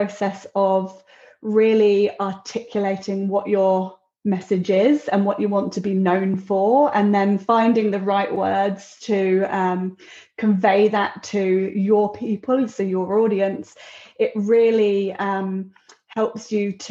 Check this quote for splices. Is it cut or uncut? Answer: uncut